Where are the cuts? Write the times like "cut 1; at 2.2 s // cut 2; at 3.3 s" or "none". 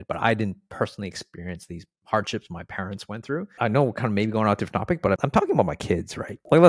cut 1; at 3.5 s // cut 2; at 5.2 s